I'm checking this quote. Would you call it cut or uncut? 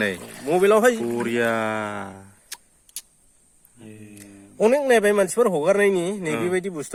uncut